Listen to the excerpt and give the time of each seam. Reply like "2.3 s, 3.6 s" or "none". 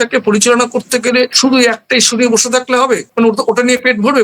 1.3 s, 3.1 s